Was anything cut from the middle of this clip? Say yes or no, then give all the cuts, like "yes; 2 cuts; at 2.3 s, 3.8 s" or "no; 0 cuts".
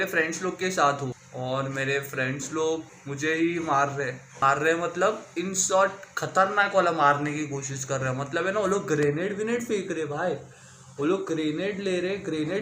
yes; 3 cuts; at 1.2 s, 3.0 s, 4.3 s